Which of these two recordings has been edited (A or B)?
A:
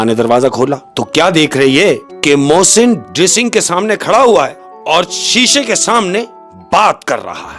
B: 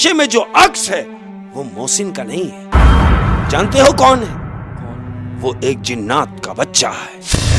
A